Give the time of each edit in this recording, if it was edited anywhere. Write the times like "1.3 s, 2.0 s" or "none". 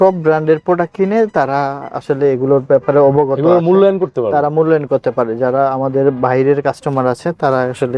none